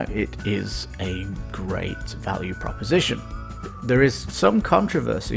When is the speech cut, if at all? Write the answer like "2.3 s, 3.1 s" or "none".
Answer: 3.7 s